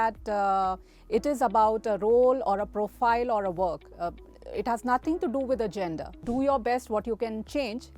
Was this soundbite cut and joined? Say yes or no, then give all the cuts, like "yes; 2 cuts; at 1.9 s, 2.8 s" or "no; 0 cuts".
yes; 1 cut; at 6.2 s